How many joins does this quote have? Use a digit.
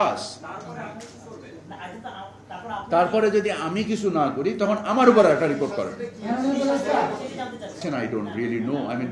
1